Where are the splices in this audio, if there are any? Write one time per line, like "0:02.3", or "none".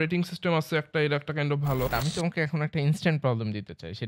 0:01.9